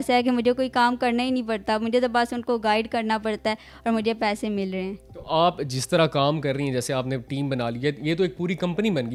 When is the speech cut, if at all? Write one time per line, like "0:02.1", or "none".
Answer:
none